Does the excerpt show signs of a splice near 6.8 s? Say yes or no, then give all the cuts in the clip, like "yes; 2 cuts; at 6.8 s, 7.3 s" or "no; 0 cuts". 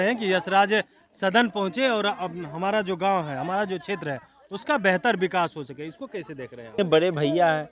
yes; 1 cut; at 6.8 s